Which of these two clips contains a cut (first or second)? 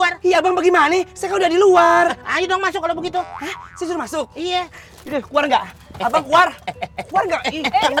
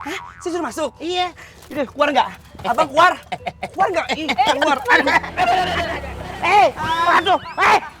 second